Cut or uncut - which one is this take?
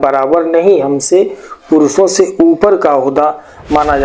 uncut